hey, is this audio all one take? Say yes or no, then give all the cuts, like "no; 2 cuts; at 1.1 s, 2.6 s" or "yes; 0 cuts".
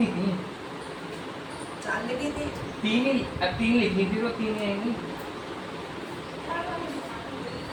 yes; 0 cuts